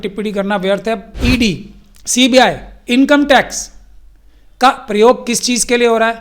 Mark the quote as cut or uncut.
cut